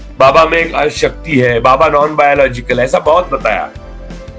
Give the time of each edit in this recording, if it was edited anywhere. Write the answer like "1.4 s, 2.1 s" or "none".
none